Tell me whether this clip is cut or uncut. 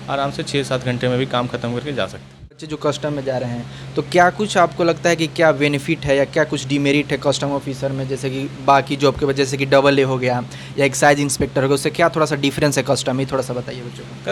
uncut